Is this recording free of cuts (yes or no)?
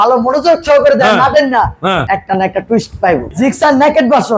no